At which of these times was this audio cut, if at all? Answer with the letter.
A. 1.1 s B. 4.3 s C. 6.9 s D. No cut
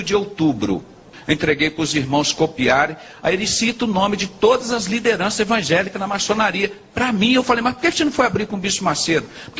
A